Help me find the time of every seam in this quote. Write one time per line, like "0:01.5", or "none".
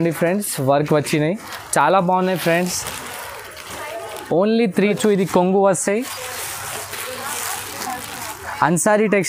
0:04.8